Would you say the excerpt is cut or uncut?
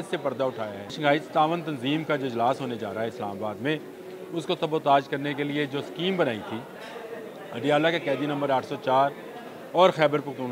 cut